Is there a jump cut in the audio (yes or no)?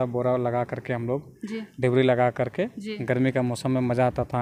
no